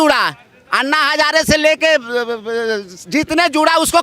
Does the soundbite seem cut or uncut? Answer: uncut